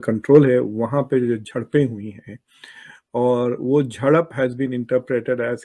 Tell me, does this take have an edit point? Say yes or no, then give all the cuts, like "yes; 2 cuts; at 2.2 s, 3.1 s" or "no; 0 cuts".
no; 0 cuts